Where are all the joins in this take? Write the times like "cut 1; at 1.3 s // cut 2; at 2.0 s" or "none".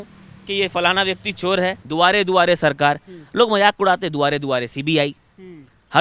cut 1; at 1.8 s